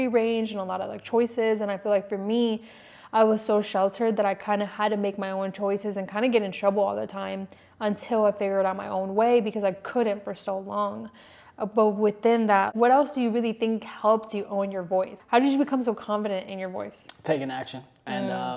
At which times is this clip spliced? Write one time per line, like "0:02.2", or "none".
0:12.7
0:15.2